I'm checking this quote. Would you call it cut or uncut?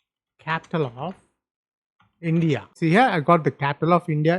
cut